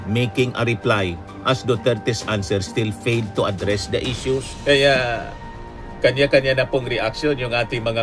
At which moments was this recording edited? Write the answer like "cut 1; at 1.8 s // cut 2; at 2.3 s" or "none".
cut 1; at 4.5 s